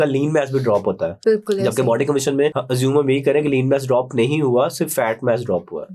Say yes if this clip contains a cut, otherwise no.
yes